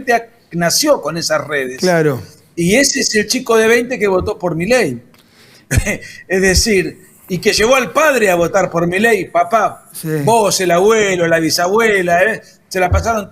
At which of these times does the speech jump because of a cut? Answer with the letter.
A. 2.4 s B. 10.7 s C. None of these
C